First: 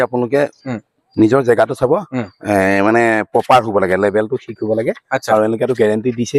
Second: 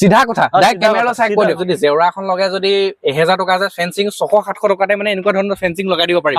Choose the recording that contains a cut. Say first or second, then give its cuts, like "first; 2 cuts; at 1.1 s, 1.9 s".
second; 1 cut; at 1.6 s